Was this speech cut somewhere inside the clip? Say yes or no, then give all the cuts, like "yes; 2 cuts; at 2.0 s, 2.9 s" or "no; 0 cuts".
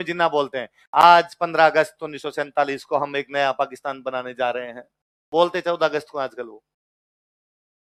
no; 0 cuts